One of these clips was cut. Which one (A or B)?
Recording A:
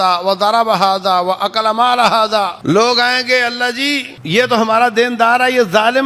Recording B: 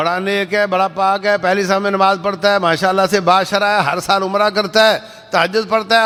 A